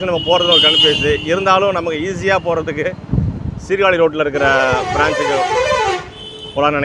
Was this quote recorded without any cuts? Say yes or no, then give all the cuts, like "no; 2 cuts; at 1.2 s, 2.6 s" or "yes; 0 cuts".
yes; 0 cuts